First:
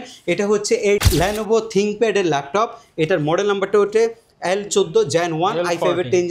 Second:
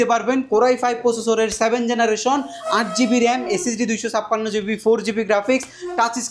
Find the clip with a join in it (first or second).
first